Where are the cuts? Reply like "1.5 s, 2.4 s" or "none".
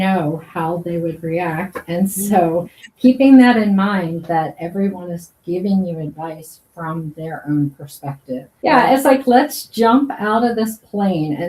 8.5 s